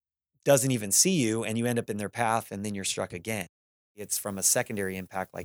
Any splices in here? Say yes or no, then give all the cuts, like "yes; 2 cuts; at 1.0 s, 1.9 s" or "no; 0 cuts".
yes; 1 cut; at 4.1 s